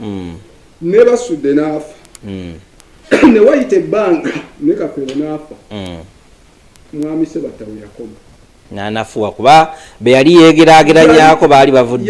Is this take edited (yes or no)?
no